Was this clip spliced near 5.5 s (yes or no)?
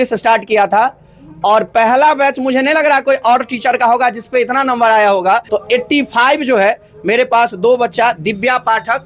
yes